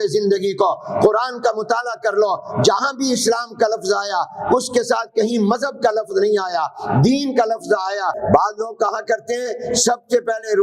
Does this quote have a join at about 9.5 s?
no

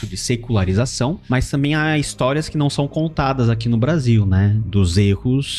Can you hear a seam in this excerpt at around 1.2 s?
yes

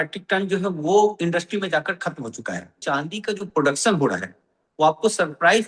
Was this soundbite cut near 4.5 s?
no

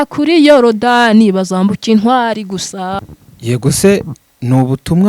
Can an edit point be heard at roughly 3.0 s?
yes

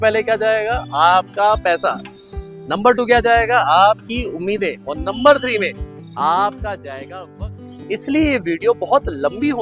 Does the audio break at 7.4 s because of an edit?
yes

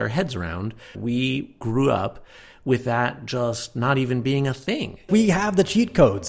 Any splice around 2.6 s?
no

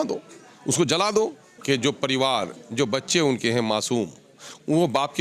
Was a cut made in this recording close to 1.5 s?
yes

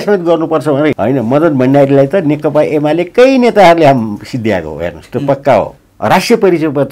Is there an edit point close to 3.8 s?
no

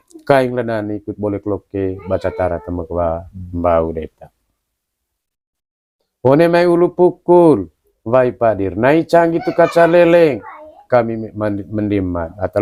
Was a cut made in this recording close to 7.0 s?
no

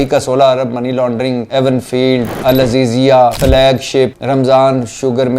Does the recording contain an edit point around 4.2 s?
yes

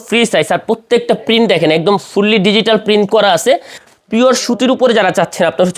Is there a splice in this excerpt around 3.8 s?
yes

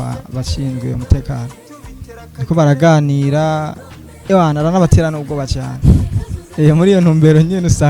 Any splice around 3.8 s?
no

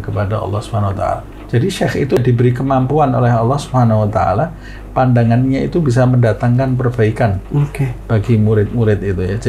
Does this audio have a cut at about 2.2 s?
yes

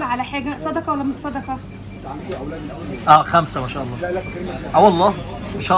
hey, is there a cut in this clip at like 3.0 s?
no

